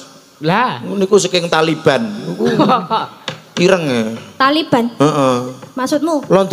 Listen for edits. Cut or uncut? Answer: uncut